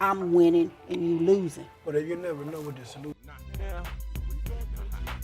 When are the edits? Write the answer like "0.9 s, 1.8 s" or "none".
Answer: 3.2 s